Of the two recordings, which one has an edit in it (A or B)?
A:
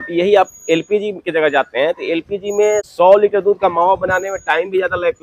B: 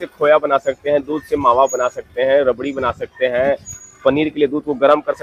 A